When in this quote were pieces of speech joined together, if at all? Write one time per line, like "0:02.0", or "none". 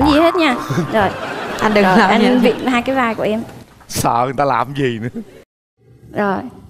none